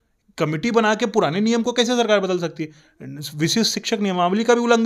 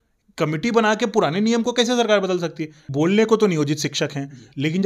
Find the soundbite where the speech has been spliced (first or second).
second